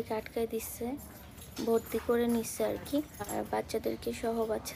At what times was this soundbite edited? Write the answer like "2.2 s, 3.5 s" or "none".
1.4 s, 3.3 s